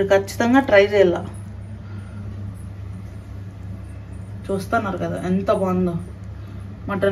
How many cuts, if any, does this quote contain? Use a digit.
0